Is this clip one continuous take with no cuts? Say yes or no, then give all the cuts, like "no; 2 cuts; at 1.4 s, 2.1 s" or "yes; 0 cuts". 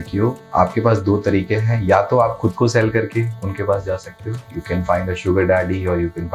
yes; 0 cuts